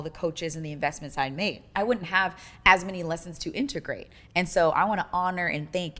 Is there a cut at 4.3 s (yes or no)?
no